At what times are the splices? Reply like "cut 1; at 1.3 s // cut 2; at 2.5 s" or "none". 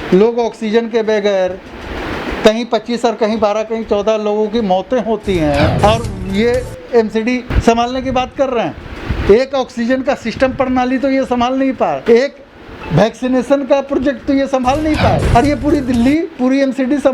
cut 1; at 5.8 s // cut 2; at 7.5 s // cut 3; at 12.0 s // cut 4; at 15.2 s